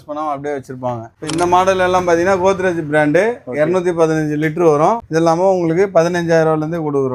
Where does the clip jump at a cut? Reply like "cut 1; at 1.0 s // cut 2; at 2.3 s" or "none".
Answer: cut 1; at 1.2 s // cut 2; at 5.0 s